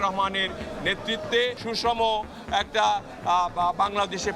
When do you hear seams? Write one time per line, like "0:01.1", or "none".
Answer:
0:01.6